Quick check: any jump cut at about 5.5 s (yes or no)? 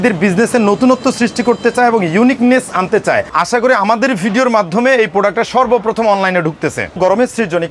no